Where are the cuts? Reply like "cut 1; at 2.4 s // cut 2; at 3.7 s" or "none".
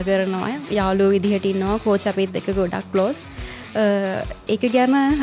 none